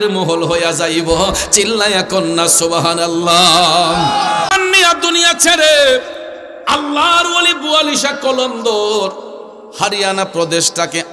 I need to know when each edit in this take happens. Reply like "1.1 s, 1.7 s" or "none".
4.5 s